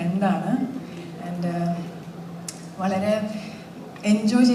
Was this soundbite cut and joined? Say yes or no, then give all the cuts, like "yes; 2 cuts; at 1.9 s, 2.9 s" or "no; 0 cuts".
no; 0 cuts